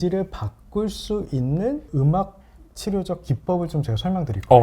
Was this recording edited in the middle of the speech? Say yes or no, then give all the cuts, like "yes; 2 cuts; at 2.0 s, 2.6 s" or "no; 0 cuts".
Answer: yes; 1 cut; at 1.9 s